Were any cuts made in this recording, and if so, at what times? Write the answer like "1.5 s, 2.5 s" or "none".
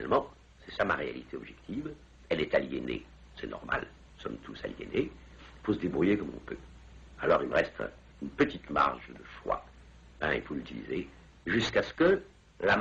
none